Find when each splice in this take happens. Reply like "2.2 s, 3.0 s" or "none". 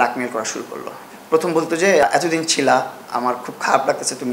1.1 s, 2.0 s